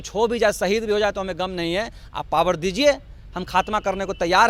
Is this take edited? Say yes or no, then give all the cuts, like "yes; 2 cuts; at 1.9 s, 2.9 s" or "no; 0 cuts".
no; 0 cuts